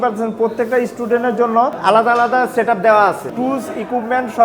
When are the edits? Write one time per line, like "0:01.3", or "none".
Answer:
0:01.8
0:03.3

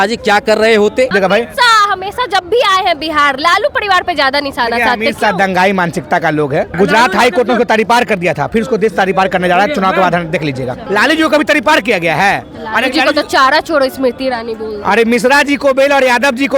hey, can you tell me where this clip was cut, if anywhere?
0:01.1
0:06.7
0:10.8

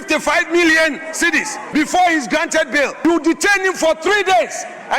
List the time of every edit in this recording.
0:01.6
0:02.9

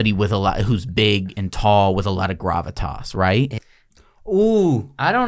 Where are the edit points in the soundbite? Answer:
0:03.6

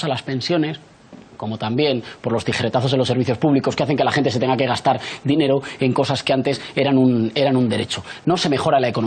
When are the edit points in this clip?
0:04.0

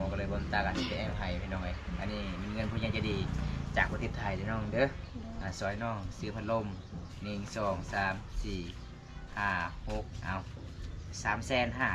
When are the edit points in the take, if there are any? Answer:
none

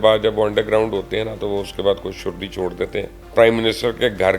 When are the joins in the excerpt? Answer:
0:03.2

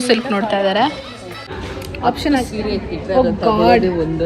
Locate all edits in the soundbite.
0:01.5

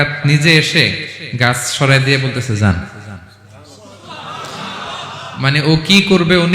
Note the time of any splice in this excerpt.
none

